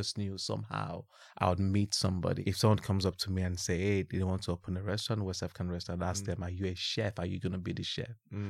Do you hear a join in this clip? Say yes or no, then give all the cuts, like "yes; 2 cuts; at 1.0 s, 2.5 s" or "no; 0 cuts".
yes; 1 cut; at 2.4 s